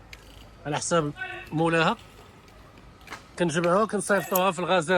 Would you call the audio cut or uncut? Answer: uncut